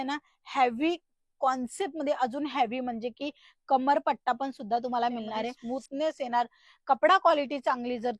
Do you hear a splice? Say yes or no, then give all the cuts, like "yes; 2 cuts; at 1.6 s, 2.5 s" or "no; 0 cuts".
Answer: yes; 1 cut; at 5.6 s